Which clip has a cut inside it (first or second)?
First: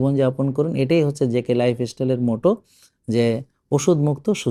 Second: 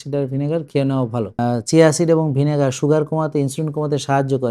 second